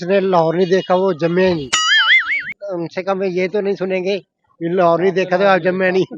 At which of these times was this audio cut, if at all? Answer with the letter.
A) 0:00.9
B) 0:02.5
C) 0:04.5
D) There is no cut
B